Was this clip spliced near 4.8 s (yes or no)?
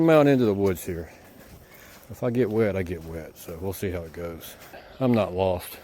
yes